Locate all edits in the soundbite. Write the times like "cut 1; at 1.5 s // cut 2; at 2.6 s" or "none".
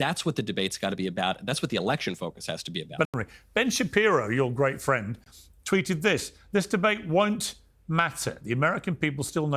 cut 1; at 3.1 s